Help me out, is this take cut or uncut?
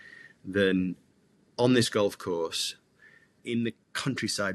cut